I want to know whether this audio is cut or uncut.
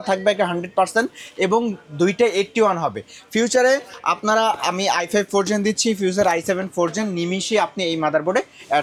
uncut